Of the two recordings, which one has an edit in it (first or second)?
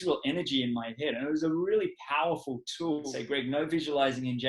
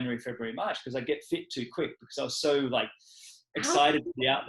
first